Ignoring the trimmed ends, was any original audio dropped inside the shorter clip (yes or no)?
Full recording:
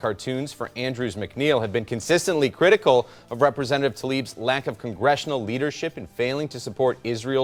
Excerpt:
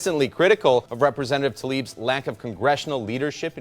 yes